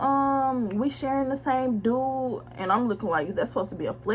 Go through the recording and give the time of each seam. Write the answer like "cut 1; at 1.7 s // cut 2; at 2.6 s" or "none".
none